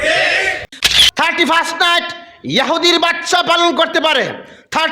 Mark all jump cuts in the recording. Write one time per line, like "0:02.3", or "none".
0:00.9